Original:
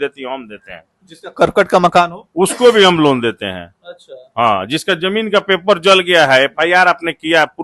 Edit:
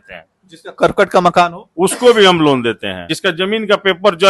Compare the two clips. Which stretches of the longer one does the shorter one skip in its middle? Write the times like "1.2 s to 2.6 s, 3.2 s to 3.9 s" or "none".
3.7 s to 4.7 s